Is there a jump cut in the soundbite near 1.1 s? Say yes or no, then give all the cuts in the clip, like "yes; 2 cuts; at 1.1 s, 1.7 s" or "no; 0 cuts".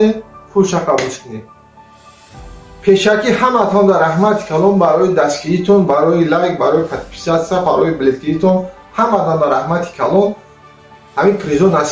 yes; 1 cut; at 1.1 s